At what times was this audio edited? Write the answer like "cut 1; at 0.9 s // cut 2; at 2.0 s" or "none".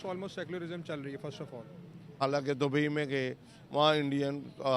cut 1; at 2.1 s